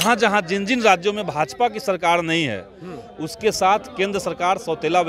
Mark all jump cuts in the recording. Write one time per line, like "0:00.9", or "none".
none